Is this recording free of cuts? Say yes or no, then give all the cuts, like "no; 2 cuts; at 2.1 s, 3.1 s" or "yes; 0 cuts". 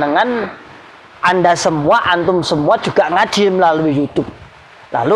yes; 0 cuts